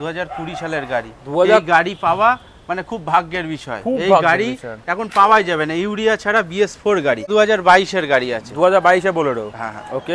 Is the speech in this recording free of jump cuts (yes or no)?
no